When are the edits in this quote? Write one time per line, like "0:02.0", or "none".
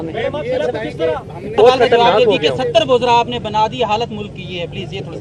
0:01.5